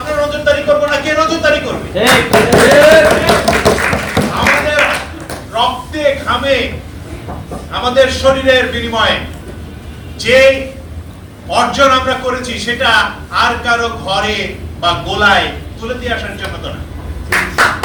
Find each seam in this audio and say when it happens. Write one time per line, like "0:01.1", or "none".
none